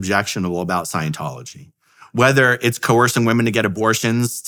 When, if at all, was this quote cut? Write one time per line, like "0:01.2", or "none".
none